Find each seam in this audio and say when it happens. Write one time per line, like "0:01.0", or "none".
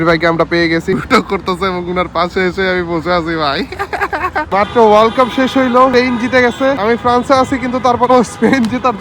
0:00.9
0:04.5
0:05.9
0:06.8